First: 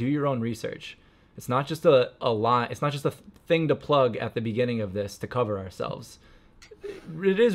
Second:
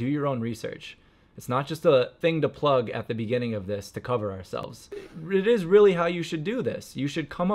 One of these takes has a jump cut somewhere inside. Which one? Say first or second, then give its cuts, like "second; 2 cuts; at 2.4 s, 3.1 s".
second; 2 cuts; at 2.1 s, 4.8 s